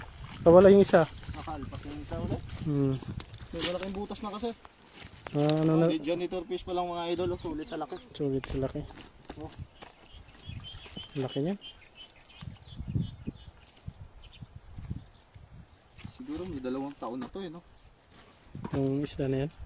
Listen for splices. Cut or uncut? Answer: uncut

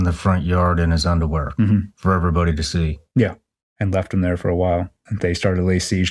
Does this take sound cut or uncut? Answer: cut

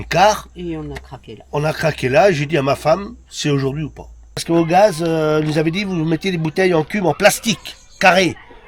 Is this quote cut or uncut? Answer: cut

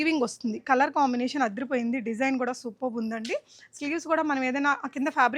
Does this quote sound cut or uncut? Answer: uncut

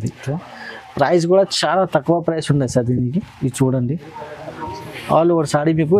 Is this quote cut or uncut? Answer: uncut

